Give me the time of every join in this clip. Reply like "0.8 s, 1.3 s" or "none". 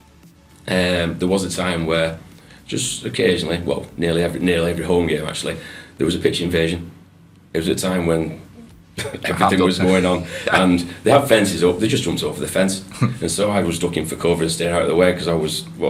none